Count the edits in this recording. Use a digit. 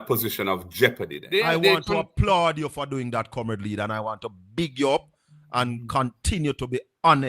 1